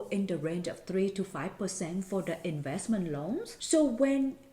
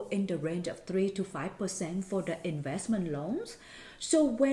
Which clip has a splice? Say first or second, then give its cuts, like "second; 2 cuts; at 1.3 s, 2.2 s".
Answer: first; 1 cut; at 3.5 s